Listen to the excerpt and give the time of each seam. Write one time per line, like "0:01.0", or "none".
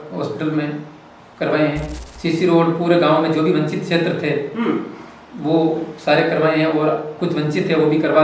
0:02.0